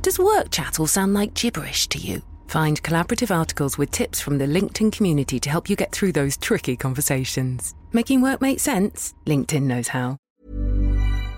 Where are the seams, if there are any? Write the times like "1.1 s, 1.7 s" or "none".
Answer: 10.3 s